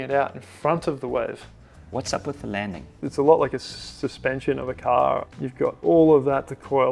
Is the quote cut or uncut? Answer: cut